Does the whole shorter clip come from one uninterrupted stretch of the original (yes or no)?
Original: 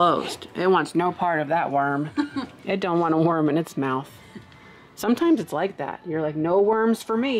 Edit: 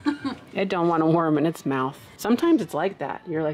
no